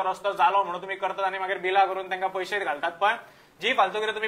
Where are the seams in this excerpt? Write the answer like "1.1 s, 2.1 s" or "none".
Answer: none